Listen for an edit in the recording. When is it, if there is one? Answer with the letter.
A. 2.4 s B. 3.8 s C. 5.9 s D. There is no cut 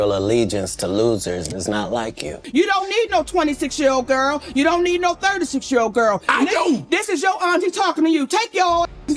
A